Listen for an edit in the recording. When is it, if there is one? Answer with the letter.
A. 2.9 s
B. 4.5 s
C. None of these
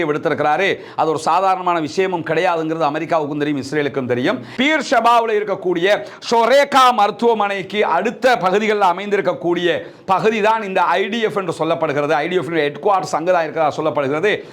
B